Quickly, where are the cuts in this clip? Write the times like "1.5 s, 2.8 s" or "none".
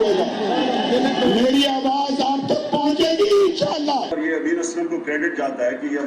4.1 s